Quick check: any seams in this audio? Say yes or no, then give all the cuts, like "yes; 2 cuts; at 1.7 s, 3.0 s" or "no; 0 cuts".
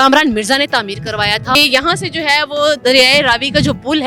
yes; 1 cut; at 1.5 s